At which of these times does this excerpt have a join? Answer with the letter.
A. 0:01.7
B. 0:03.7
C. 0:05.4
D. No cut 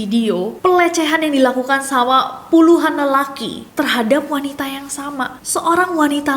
C